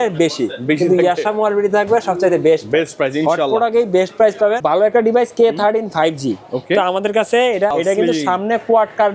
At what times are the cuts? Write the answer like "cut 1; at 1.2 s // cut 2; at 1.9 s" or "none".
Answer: cut 1; at 4.6 s // cut 2; at 7.7 s

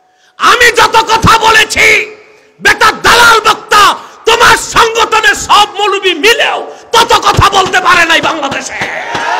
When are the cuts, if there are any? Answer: none

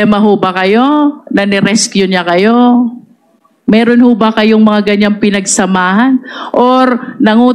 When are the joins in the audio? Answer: none

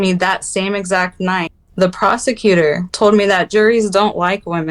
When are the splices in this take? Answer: cut 1; at 1.6 s // cut 2; at 2.9 s

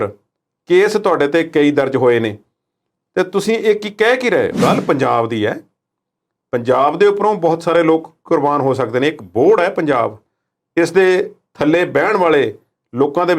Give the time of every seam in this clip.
cut 1; at 4.5 s

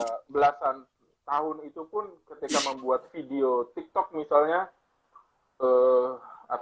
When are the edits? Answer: none

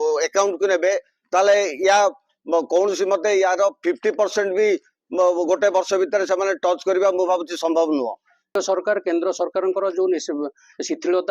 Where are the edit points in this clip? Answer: cut 1; at 8.6 s

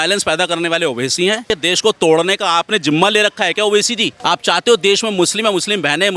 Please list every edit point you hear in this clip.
cut 1; at 1.5 s // cut 2; at 4.1 s

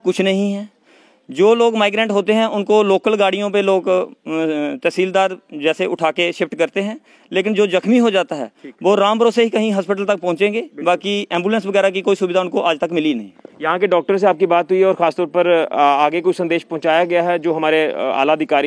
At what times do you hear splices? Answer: none

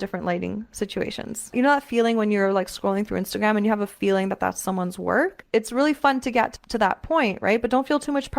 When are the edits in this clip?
cut 1; at 1.5 s // cut 2; at 5.4 s // cut 3; at 6.6 s

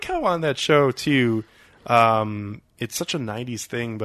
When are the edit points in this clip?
none

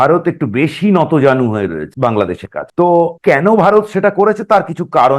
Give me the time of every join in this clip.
cut 1; at 1.8 s // cut 2; at 3.2 s

